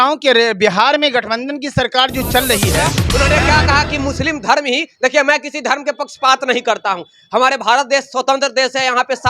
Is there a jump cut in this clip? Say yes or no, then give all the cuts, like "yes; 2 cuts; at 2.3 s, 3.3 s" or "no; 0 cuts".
yes; 1 cut; at 3.0 s